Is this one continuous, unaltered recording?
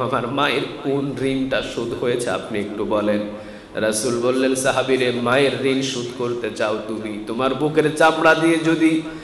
yes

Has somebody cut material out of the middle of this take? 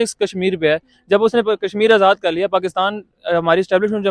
no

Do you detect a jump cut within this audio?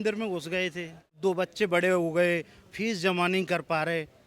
yes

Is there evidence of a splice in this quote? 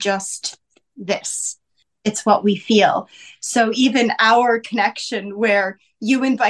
yes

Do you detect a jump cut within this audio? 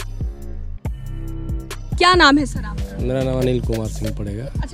no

